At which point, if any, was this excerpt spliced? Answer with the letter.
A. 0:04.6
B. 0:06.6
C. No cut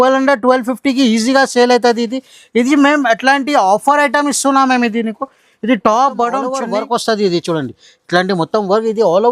B